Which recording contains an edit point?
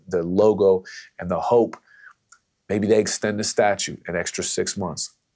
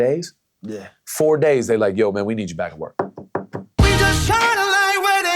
second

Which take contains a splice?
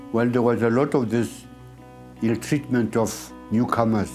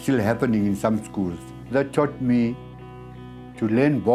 second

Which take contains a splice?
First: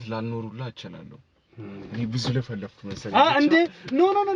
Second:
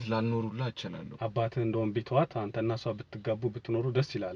second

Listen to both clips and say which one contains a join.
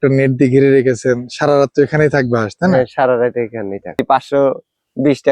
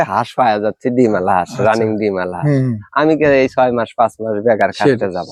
first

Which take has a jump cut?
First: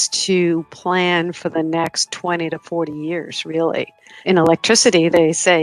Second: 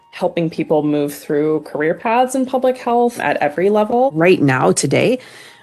second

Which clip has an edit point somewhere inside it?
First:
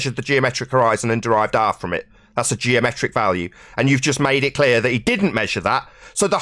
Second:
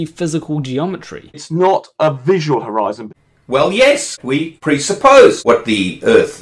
second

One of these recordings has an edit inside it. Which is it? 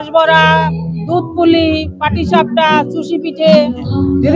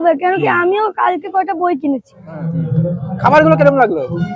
second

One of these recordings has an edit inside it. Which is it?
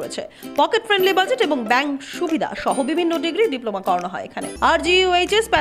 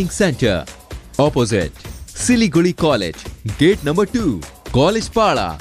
first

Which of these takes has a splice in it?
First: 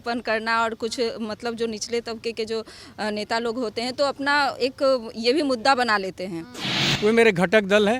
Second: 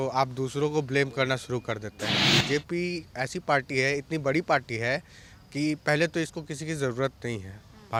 first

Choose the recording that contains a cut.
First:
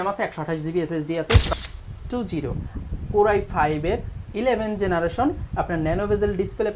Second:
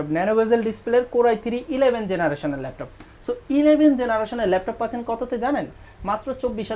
first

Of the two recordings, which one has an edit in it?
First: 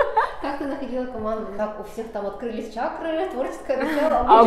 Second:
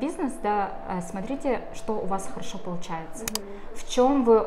first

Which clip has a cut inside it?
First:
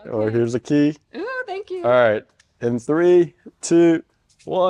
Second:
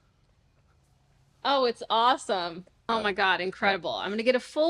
second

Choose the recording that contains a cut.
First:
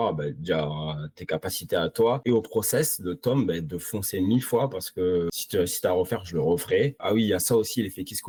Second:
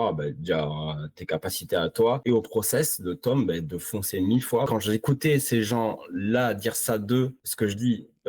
second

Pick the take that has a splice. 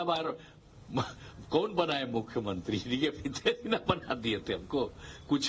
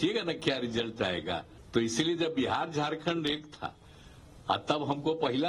second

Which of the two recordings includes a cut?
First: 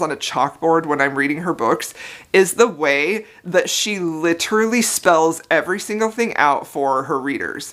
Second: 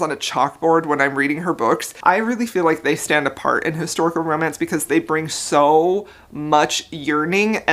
second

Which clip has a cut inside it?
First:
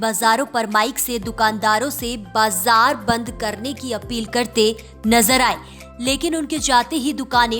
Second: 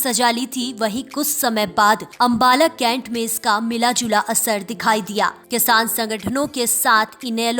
second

